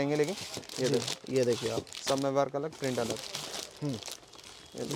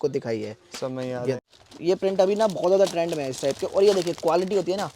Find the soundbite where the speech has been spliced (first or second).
second